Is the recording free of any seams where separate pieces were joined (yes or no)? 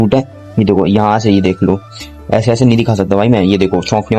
yes